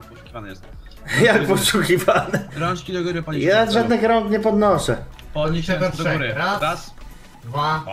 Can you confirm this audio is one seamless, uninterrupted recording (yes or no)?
yes